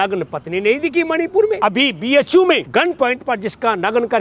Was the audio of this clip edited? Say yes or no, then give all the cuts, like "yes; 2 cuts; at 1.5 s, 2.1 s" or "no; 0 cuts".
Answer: yes; 2 cuts; at 1.6 s, 2.6 s